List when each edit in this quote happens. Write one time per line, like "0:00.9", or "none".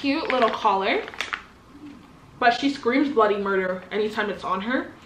none